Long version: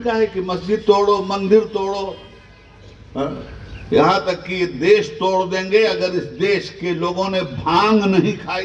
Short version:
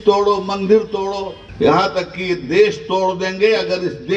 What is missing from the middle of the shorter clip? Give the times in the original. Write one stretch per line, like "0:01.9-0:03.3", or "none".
0:02.2-0:03.7